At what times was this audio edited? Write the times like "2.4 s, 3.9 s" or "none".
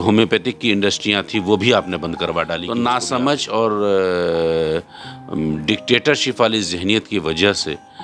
2.6 s